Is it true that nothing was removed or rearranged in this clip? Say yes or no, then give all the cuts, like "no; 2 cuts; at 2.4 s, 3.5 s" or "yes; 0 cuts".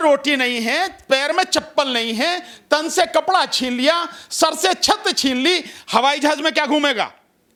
yes; 0 cuts